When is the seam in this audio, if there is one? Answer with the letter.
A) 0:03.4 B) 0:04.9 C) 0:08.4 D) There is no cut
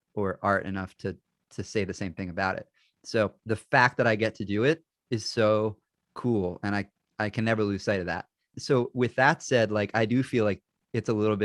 A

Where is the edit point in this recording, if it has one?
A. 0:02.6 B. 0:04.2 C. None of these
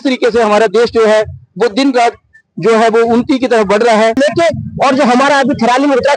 B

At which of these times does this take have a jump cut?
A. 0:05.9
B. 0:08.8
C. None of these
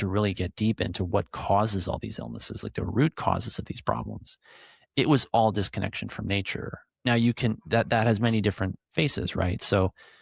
C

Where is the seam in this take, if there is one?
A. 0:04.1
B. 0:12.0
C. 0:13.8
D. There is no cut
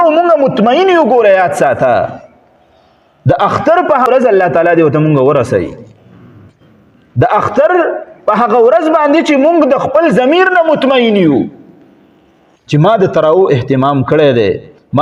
A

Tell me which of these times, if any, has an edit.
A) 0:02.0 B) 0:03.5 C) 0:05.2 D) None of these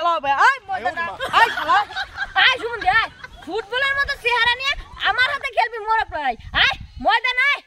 A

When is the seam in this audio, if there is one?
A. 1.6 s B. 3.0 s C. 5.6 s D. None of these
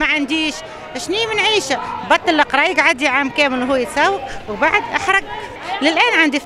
C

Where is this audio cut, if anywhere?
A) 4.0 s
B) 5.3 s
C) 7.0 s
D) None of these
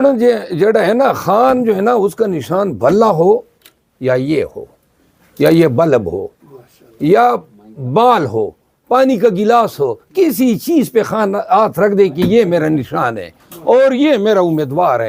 D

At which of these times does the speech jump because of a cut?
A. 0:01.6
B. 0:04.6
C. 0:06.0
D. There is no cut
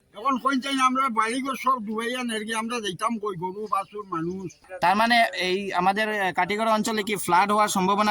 B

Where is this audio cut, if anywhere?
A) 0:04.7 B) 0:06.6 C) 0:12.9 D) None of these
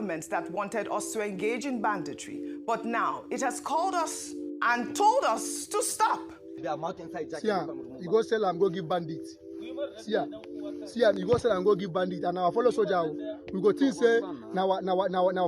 B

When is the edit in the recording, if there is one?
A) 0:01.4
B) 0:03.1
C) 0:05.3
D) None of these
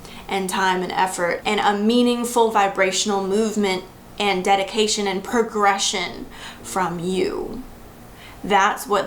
A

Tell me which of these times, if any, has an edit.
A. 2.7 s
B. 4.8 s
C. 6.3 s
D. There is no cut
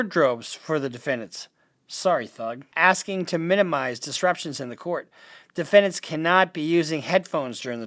A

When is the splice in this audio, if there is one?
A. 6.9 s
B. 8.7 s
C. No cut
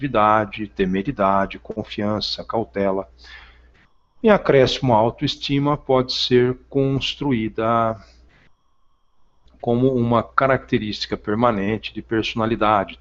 A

